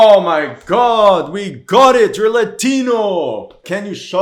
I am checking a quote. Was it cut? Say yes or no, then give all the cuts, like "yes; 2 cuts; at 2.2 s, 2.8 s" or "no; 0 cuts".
no; 0 cuts